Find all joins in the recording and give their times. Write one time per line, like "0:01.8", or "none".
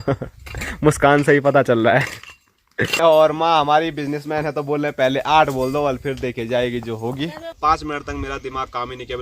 0:02.9
0:07.5